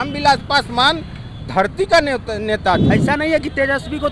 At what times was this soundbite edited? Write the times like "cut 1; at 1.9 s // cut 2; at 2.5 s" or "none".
cut 1; at 2.8 s